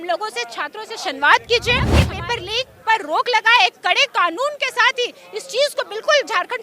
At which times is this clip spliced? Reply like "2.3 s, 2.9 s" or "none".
2.0 s